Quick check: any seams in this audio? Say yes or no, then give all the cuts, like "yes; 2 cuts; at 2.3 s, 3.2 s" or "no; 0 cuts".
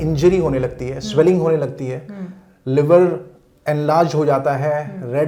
no; 0 cuts